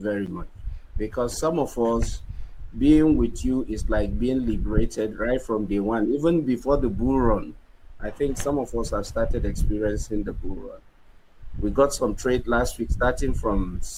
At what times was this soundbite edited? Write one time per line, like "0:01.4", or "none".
none